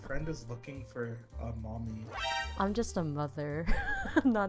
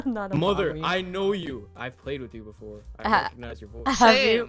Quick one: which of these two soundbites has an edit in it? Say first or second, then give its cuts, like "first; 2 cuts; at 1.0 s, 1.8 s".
second; 1 cut; at 1.7 s